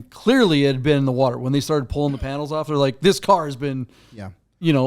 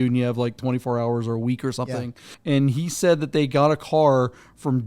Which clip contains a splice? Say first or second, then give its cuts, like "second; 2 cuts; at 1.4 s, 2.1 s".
second; 1 cut; at 2.3 s